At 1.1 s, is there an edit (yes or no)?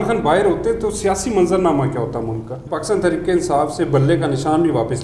no